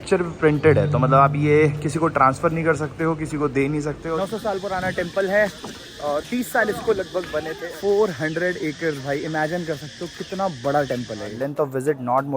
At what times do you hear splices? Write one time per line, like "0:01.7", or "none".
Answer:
0:04.0
0:07.6
0:11.3